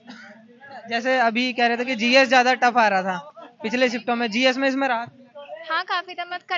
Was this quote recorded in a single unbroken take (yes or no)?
yes